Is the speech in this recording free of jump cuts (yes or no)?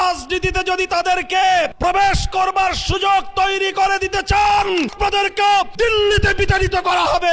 no